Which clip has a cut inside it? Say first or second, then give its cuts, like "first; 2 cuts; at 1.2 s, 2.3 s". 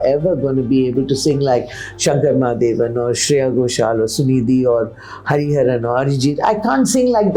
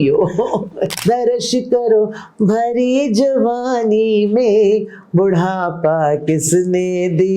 second; 1 cut; at 0.9 s